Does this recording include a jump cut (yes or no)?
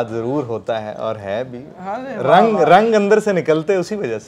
no